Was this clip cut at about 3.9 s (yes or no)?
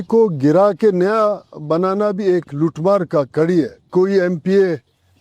yes